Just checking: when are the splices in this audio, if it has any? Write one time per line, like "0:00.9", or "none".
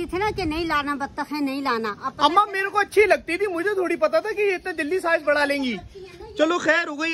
none